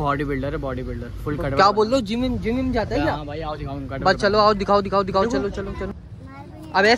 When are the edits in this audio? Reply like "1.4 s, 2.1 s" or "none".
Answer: 6.0 s